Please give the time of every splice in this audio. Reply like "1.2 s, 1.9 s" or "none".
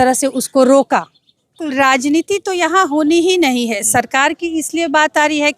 1.6 s

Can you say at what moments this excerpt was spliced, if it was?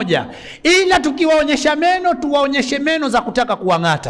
none

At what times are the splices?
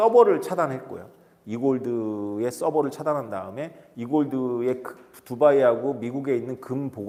none

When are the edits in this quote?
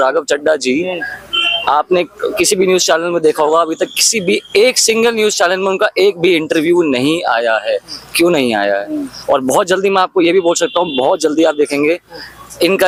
none

